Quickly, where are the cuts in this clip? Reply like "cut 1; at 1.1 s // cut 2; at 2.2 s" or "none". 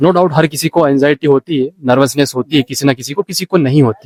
none